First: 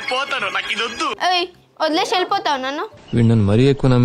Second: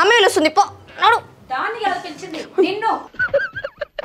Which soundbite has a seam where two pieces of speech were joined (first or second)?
first